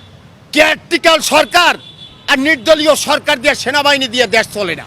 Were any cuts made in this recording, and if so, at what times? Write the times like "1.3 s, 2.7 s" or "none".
none